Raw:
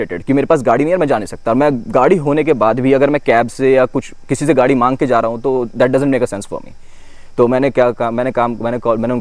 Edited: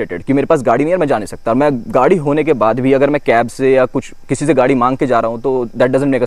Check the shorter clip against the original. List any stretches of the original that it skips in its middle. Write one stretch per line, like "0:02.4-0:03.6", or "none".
none